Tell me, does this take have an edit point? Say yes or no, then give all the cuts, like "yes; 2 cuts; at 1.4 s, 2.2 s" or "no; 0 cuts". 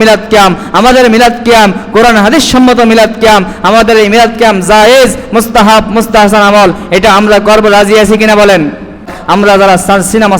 yes; 1 cut; at 9.2 s